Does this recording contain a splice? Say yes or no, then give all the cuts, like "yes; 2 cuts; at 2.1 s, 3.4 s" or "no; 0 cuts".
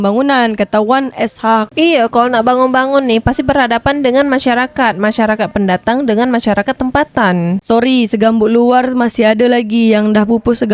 yes; 1 cut; at 7.6 s